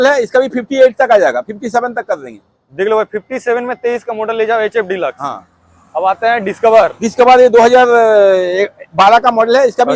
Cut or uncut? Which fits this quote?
uncut